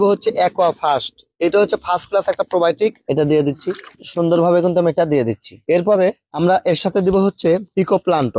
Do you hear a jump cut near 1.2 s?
no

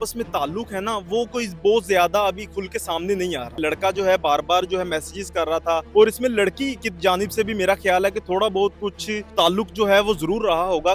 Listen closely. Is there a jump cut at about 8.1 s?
no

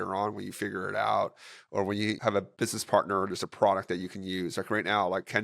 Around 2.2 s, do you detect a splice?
yes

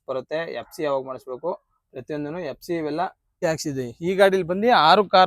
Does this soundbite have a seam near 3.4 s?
yes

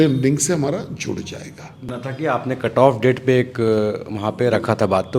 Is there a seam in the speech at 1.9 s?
yes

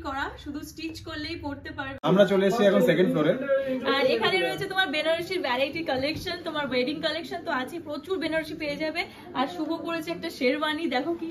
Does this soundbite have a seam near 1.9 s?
yes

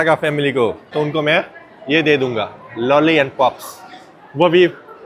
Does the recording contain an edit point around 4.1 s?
no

